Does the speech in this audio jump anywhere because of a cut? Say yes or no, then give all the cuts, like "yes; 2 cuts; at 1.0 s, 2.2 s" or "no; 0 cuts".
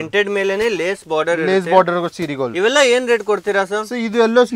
no; 0 cuts